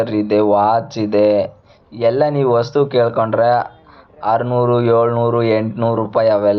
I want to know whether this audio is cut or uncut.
uncut